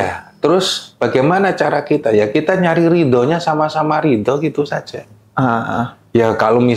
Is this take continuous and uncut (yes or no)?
yes